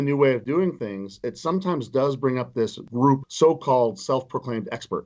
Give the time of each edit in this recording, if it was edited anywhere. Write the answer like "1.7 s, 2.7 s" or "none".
2.9 s